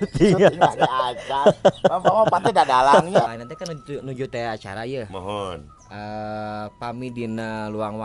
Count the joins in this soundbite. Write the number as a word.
one